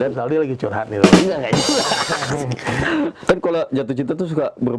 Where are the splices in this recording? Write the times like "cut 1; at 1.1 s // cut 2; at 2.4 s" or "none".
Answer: cut 1; at 3.2 s